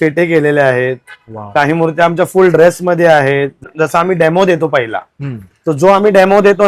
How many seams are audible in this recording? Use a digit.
1